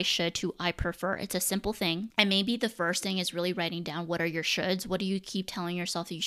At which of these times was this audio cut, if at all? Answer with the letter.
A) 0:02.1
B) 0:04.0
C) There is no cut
A